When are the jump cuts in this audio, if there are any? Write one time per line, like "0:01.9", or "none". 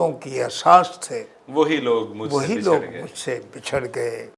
none